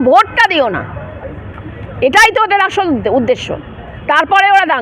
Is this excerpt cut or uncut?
uncut